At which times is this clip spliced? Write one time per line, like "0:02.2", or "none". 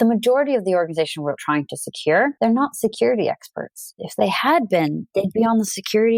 0:02.3
0:03.9